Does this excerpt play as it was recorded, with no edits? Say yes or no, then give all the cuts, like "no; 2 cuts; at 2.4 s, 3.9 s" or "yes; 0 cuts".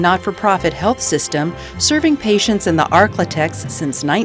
yes; 0 cuts